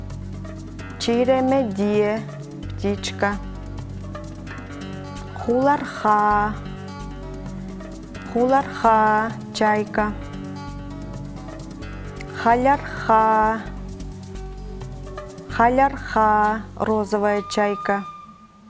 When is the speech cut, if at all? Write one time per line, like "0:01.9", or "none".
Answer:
none